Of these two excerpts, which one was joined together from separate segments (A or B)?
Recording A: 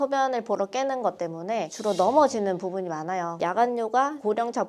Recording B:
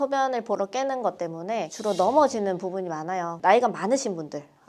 A